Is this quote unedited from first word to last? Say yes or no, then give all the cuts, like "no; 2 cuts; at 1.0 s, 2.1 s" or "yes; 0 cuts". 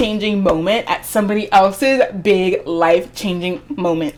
yes; 0 cuts